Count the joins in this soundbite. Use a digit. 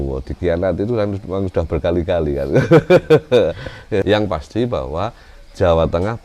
1